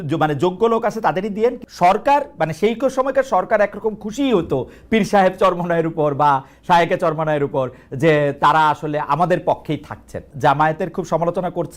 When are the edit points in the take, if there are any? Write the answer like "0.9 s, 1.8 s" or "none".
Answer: 1.6 s, 10.3 s